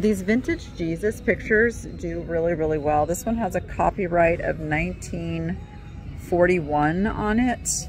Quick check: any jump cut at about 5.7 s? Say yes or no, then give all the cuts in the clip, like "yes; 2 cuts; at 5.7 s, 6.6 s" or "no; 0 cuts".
no; 0 cuts